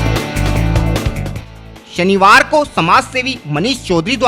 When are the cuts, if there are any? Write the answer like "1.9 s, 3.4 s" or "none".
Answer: none